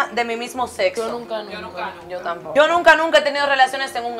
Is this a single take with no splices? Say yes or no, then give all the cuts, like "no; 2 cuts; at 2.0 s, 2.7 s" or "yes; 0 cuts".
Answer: yes; 0 cuts